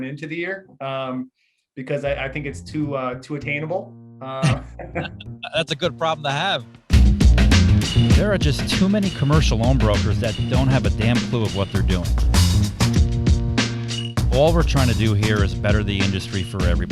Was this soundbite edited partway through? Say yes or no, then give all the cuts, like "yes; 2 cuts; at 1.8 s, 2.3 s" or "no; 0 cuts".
yes; 1 cut; at 6.9 s